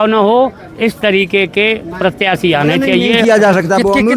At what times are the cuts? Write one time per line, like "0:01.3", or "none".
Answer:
0:03.1